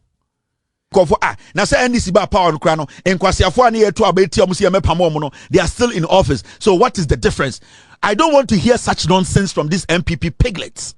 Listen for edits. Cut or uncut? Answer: cut